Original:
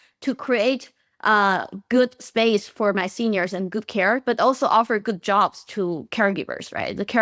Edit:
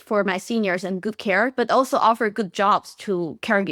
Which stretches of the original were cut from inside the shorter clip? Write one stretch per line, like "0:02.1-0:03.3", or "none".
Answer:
none